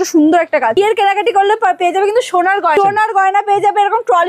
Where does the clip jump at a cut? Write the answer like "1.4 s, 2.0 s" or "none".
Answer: 0.8 s, 2.7 s